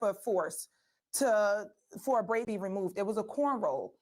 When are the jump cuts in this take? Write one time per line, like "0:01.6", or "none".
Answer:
0:02.5